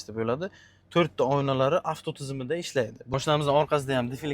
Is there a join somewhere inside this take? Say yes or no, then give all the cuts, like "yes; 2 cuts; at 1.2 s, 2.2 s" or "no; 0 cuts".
yes; 1 cut; at 3.0 s